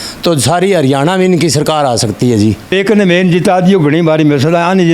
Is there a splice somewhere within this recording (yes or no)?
yes